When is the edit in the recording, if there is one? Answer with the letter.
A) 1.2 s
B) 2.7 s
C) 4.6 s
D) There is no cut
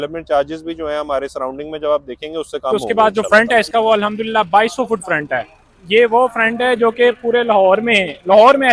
B